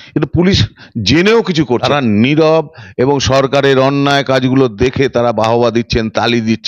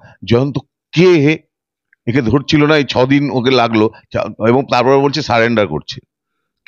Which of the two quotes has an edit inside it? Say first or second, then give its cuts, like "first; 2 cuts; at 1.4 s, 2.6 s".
first; 1 cut; at 1.8 s